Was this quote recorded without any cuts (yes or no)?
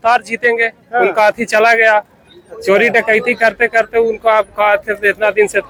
yes